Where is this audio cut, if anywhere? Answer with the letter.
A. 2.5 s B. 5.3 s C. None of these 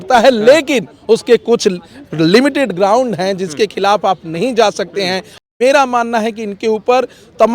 B